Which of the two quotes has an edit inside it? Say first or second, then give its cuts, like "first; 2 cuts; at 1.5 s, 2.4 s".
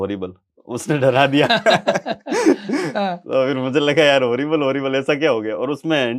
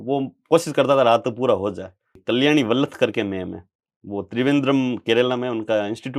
second; 1 cut; at 2.1 s